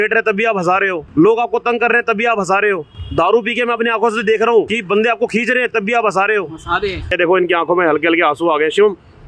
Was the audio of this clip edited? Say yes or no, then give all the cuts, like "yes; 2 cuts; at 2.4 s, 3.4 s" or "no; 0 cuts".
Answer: yes; 4 cuts; at 1.0 s, 2.9 s, 4.8 s, 7.0 s